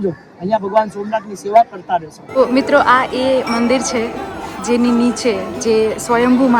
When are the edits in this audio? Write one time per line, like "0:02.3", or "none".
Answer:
0:02.2